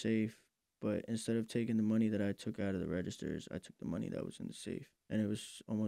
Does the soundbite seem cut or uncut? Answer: cut